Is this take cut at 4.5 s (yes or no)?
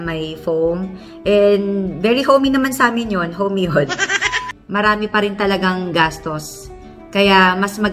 yes